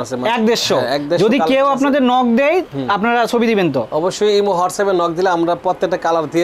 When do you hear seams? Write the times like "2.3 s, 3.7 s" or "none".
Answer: none